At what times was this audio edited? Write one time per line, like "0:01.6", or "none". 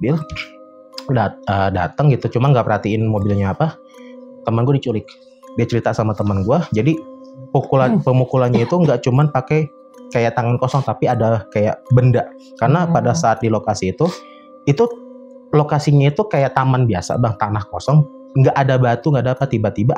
0:05.4